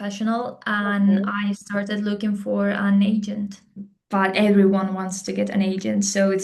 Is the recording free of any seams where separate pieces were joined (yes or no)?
no